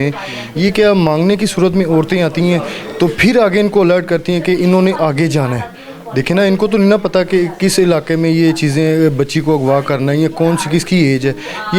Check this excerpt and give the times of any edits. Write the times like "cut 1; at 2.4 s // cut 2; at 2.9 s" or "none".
none